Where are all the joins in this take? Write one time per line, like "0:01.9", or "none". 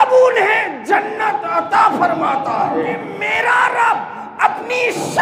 0:03.2